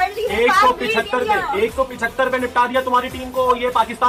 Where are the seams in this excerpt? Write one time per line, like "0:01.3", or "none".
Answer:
none

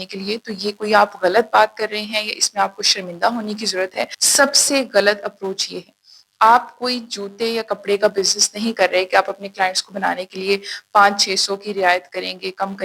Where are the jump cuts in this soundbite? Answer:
0:04.2

